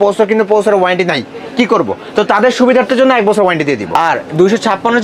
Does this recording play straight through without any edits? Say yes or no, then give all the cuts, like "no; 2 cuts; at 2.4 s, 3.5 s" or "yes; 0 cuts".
no; 1 cut; at 3.9 s